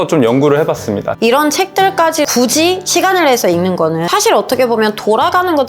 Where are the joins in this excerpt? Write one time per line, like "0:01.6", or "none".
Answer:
0:01.1
0:02.3
0:04.1